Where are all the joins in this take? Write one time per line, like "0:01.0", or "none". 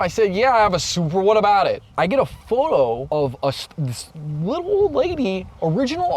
0:01.9
0:03.0